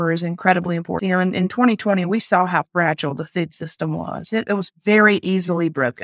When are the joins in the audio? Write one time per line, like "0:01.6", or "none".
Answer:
0:00.9